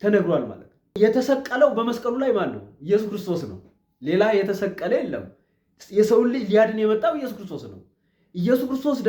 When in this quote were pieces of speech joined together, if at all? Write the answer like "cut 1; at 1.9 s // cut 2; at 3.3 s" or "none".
cut 1; at 0.9 s

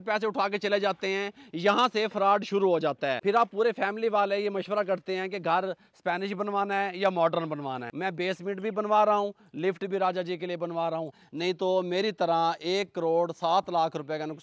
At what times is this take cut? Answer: cut 1; at 3.2 s // cut 2; at 7.9 s // cut 3; at 11.2 s

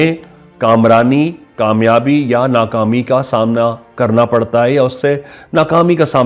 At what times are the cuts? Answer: none

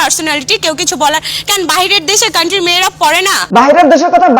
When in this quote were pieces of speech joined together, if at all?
cut 1; at 3.5 s

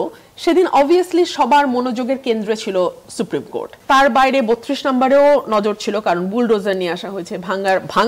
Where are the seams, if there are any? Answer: cut 1; at 3.8 s

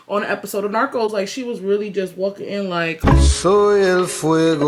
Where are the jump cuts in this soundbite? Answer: none

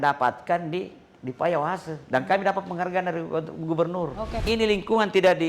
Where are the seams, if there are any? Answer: cut 1; at 4.4 s

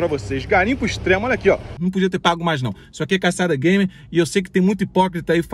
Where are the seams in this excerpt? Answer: cut 1; at 1.8 s

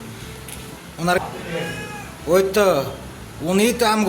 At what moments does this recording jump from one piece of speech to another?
cut 1; at 1.2 s

